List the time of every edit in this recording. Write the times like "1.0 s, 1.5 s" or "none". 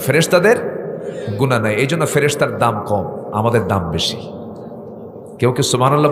none